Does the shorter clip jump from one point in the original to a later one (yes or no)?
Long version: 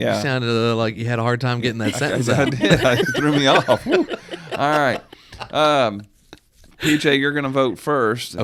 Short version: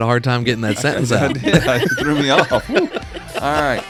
no